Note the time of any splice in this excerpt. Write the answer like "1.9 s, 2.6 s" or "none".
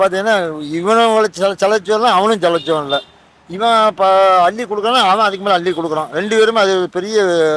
none